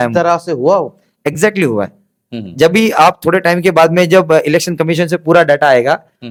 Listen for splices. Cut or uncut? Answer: uncut